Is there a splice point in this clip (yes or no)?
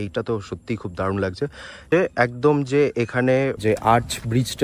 yes